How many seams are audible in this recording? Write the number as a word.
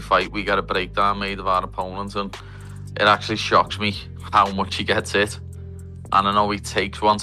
zero